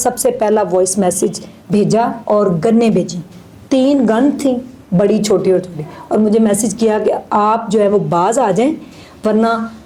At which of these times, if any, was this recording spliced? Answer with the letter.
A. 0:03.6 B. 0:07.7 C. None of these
C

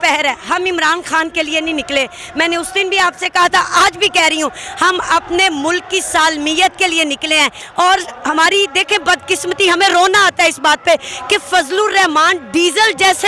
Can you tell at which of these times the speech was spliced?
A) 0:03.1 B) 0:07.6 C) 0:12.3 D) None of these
B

